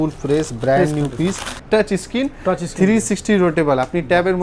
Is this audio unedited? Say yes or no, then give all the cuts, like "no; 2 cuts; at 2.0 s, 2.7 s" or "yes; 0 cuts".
no; 1 cut; at 1.6 s